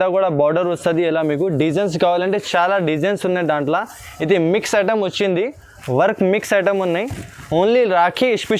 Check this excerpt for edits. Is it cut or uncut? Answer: uncut